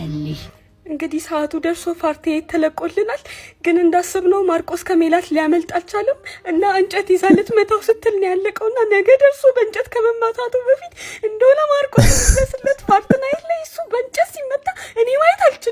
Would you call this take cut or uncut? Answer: uncut